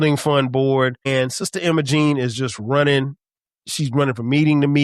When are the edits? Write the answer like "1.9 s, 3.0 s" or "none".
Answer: 1.1 s